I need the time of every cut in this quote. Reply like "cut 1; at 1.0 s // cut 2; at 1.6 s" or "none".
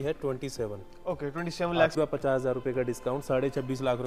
cut 1; at 1.9 s